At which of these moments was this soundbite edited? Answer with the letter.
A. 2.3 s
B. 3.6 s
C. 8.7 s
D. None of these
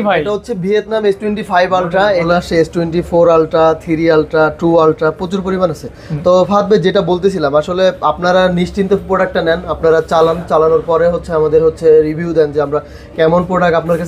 A